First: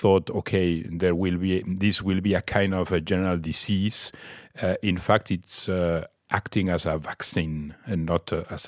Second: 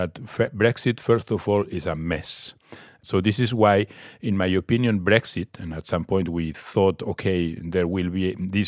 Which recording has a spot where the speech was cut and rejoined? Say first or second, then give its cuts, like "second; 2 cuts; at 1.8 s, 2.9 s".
second; 1 cut; at 3.0 s